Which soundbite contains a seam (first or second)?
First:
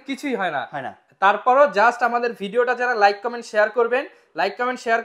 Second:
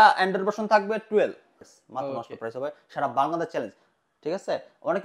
second